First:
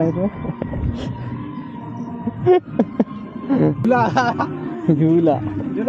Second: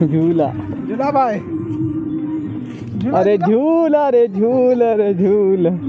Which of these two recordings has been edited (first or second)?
first